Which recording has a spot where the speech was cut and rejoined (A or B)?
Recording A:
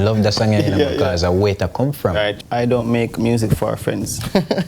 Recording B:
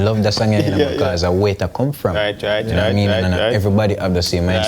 A